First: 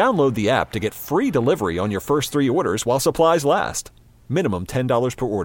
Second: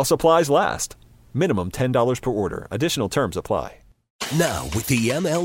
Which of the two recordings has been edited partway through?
second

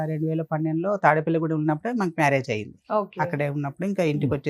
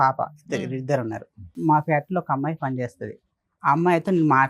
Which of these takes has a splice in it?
second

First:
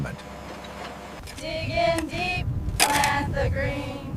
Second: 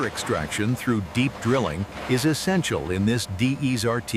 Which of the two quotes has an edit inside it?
first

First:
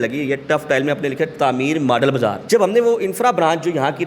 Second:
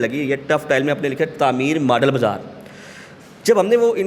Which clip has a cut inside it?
first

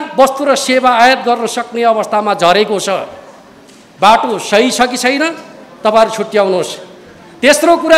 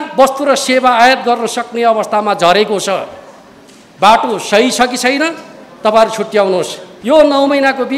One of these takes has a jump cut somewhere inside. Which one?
second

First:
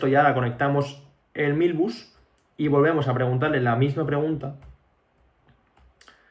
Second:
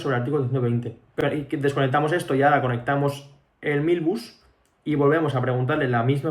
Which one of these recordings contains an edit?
second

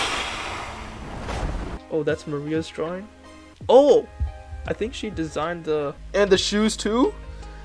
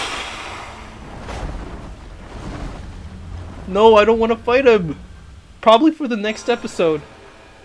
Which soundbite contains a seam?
first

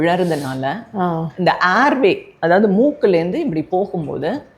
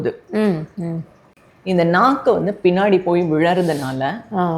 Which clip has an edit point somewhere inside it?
second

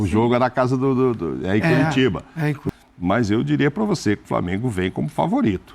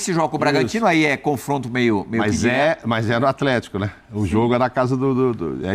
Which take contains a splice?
first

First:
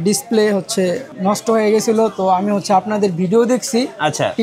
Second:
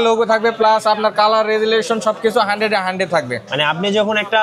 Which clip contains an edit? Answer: first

